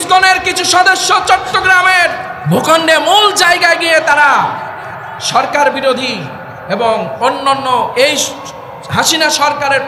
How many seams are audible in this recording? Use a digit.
1